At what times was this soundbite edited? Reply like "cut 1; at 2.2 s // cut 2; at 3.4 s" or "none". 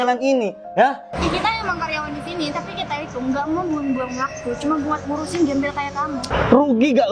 cut 1; at 1.1 s // cut 2; at 6.2 s